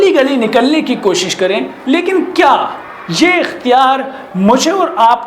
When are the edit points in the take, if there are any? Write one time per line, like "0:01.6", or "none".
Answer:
0:01.7